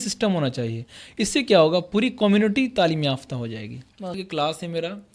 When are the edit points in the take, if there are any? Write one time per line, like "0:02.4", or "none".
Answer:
0:04.2